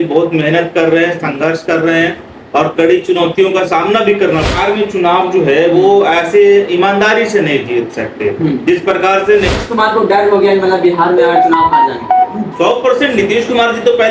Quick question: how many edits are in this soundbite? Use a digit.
2